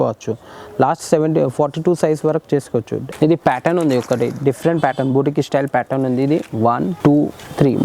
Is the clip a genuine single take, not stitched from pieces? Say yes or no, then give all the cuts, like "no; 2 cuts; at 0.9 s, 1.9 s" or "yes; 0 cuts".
no; 2 cuts; at 3.0 s, 6.9 s